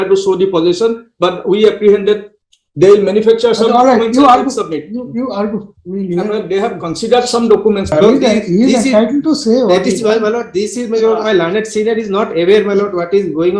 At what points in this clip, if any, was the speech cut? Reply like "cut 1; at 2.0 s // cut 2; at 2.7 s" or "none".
cut 1; at 7.9 s